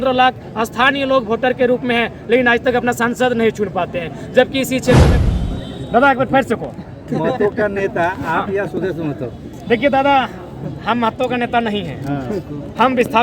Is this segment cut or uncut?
cut